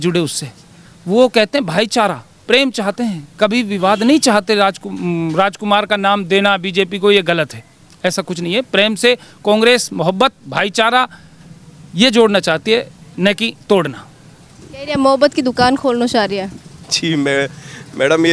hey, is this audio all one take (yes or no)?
yes